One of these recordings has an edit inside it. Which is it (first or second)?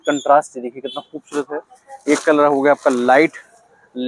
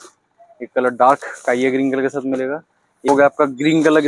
second